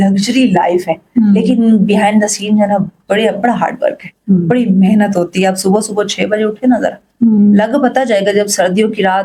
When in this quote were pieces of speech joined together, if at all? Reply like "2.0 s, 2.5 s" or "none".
none